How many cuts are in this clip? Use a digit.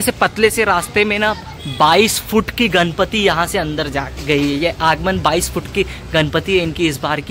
0